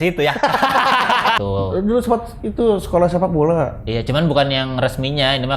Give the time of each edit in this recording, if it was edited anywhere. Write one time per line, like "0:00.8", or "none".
0:01.4